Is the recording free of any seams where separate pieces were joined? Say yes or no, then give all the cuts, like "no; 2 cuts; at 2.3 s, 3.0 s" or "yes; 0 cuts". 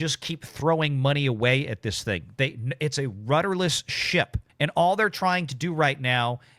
no; 1 cut; at 4.4 s